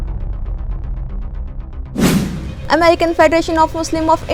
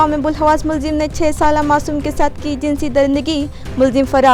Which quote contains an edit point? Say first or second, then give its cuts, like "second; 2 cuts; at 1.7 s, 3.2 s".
first; 1 cut; at 2.0 s